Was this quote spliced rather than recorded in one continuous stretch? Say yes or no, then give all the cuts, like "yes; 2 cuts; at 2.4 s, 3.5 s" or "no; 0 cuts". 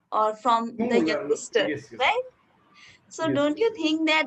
no; 0 cuts